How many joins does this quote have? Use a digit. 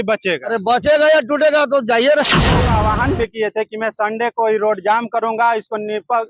1